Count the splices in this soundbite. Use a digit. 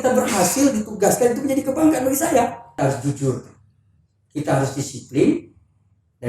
1